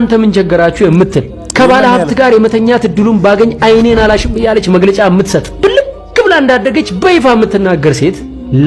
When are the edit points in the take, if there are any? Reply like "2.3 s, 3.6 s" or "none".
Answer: none